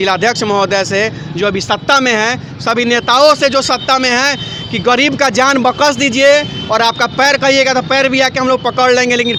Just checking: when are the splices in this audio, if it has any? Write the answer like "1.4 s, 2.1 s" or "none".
none